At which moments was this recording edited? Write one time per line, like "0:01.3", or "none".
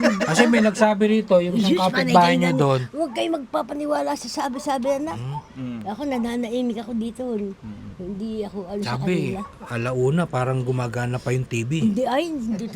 none